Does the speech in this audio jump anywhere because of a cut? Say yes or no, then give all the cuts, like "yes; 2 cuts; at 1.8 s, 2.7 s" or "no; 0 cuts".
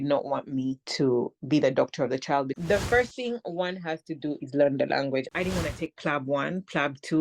yes; 2 cuts; at 2.6 s, 5.3 s